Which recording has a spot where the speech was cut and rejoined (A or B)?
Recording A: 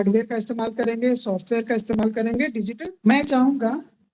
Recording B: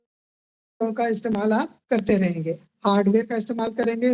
A